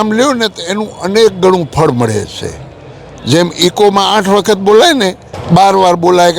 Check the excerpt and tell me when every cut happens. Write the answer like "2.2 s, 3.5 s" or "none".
5.3 s